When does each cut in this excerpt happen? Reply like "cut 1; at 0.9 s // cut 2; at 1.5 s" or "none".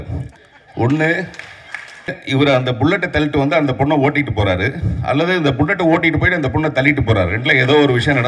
cut 1; at 2.2 s